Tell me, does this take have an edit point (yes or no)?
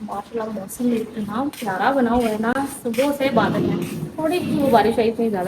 no